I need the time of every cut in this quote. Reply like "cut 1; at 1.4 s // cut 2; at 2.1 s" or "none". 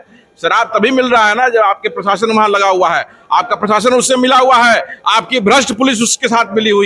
none